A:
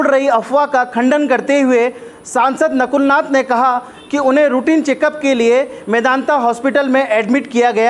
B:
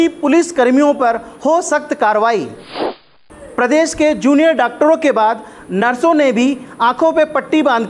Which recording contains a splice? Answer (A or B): B